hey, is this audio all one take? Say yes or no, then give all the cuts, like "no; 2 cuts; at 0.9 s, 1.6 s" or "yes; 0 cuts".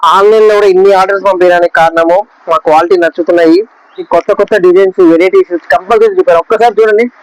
no; 1 cut; at 4.0 s